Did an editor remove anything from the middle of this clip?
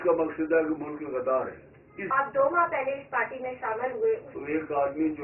yes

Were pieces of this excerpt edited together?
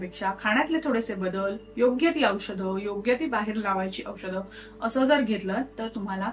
no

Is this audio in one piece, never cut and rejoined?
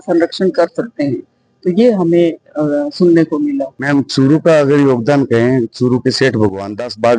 yes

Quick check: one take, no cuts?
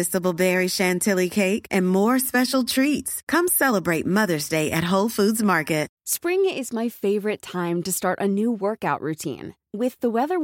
no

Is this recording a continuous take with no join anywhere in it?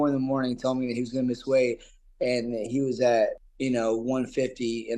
no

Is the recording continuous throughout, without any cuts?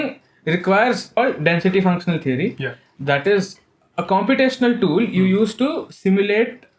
no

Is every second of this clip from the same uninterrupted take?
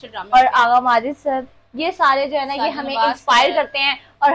yes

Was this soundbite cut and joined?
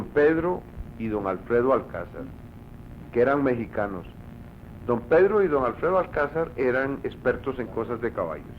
yes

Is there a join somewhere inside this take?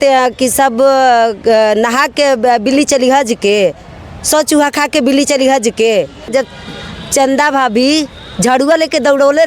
yes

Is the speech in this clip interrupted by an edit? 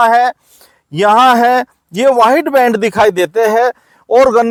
no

